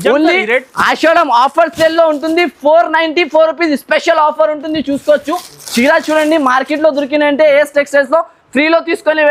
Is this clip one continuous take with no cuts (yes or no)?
yes